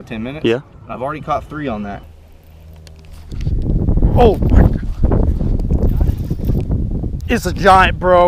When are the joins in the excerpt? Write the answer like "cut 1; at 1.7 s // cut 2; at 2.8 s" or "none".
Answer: cut 1; at 2.1 s